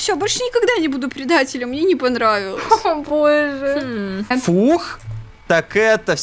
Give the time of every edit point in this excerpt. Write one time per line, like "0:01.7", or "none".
0:04.3